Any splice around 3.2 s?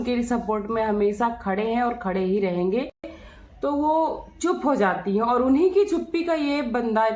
yes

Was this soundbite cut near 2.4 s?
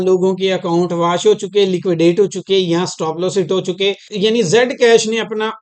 no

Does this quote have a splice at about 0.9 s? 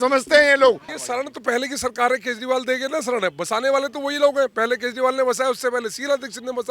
yes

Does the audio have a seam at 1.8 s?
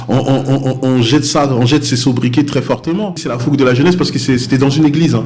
no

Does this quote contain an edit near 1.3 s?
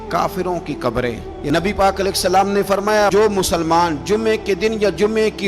yes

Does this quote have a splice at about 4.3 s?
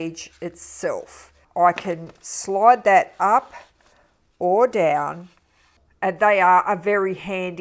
no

